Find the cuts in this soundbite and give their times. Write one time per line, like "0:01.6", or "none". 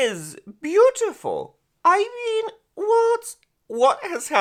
none

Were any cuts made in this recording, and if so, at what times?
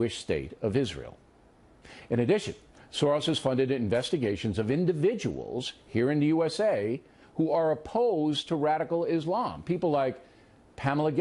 none

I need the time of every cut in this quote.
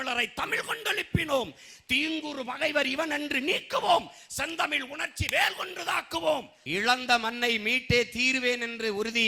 0:06.6

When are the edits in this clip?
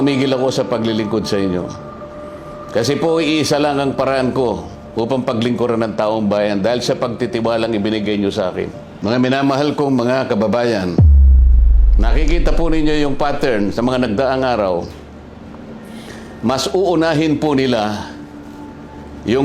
0:08.8

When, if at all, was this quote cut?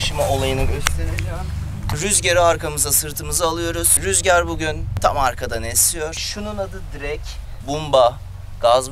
0:02.0
0:04.9
0:06.2
0:07.5

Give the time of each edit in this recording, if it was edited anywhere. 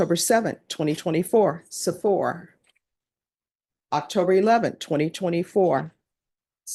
none

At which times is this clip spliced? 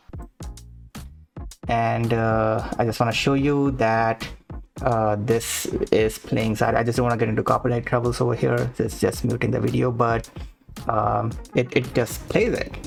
none

